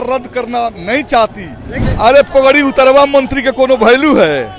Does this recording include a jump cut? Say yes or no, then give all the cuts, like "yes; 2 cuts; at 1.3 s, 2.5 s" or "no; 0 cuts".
yes; 1 cut; at 1.8 s